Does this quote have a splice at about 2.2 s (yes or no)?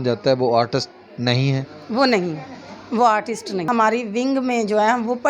no